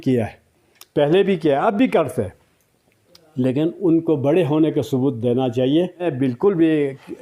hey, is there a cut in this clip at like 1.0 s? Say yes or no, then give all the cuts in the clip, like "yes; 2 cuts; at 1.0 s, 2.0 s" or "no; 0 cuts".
no; 1 cut; at 6.1 s